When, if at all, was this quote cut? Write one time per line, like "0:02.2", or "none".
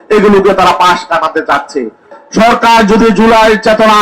0:02.1